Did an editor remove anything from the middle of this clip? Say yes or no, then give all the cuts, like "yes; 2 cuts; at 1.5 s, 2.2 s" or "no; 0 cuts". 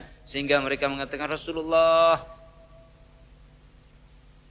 no; 0 cuts